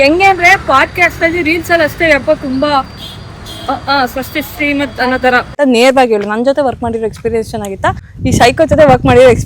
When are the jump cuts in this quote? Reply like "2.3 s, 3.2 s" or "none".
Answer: 5.5 s, 8.1 s